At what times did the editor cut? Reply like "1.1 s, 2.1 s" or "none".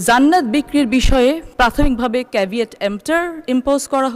1.5 s